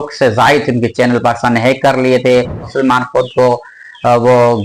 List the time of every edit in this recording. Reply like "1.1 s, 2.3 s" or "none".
2.7 s